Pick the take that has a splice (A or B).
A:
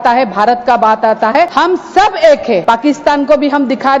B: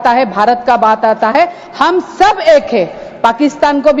A